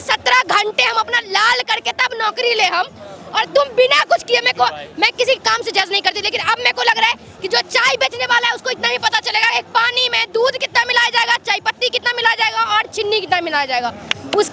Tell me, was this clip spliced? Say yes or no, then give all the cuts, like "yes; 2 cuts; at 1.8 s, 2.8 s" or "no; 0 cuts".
no; 0 cuts